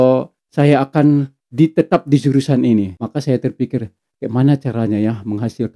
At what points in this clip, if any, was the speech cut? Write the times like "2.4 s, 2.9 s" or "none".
3.0 s